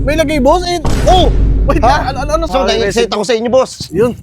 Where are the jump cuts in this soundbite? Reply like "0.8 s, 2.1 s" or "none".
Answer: 2.5 s